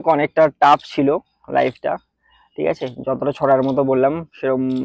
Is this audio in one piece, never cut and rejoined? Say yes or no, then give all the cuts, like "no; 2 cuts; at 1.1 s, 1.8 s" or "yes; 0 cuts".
yes; 0 cuts